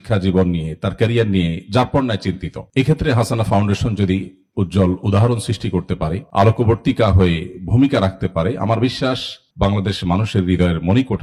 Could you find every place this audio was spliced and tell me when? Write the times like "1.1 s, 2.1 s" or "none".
none